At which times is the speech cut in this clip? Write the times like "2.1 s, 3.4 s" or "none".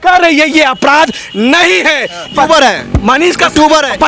2.3 s